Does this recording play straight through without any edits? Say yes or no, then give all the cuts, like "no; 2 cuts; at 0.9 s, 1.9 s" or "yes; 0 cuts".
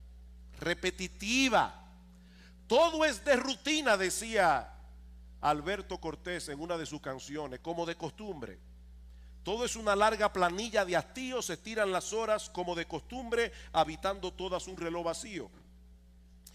no; 1 cut; at 12.7 s